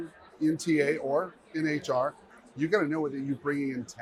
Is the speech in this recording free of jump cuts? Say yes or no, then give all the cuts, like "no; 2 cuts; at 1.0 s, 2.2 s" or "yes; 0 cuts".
yes; 0 cuts